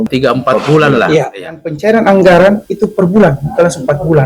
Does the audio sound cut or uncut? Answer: cut